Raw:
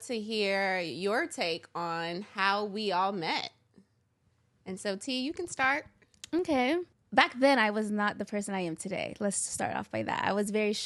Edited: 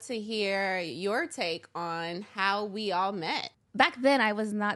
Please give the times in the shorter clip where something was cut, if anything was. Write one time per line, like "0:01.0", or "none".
0:03.6